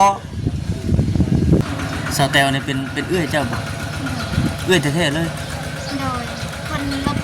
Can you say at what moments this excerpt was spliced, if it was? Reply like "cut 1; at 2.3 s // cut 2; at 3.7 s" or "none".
cut 1; at 1.6 s